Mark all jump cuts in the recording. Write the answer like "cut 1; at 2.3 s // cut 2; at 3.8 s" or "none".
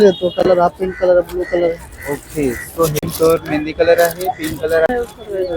cut 1; at 2.9 s // cut 2; at 4.9 s